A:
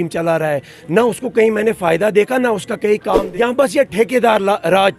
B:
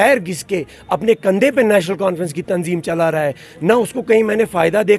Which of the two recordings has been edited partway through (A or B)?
A